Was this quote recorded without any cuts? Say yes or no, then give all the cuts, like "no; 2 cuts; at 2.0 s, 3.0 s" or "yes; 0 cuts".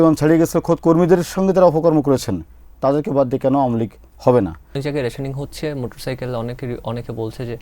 no; 1 cut; at 4.8 s